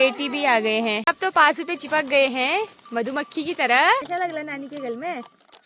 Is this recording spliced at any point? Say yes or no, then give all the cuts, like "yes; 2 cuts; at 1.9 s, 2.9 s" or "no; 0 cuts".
yes; 2 cuts; at 1.0 s, 4.1 s